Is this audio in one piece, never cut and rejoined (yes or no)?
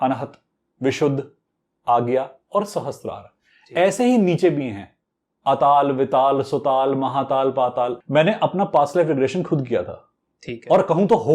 no